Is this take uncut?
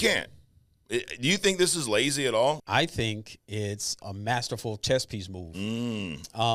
no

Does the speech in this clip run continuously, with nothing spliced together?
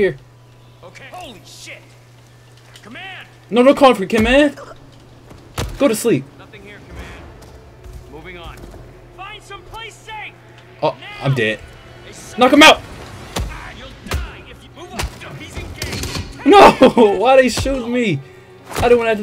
yes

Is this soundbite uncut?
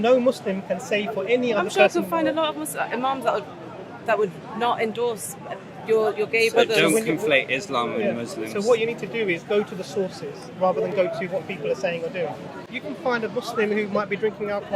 no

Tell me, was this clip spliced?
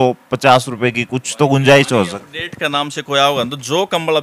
no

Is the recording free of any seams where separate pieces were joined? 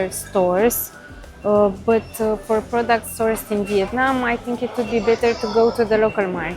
yes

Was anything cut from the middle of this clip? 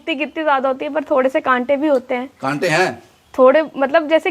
no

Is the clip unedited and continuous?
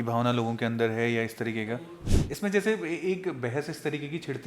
no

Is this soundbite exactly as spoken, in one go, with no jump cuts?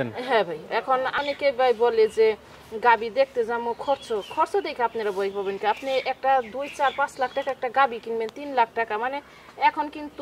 no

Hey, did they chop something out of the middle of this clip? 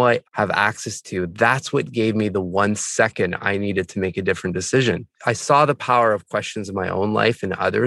yes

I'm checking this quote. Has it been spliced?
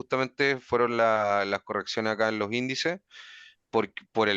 no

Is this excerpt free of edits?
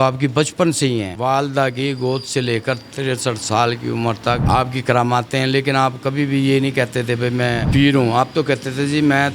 no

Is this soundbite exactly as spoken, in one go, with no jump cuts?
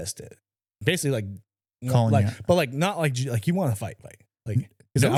yes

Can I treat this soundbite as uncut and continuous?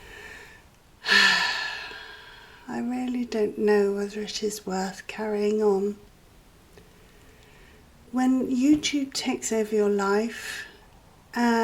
yes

